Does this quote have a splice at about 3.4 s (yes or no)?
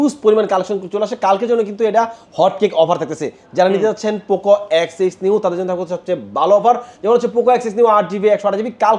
no